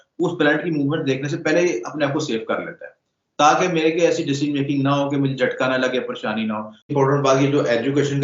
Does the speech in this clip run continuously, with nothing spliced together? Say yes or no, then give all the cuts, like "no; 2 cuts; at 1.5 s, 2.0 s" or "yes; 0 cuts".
no; 1 cut; at 6.9 s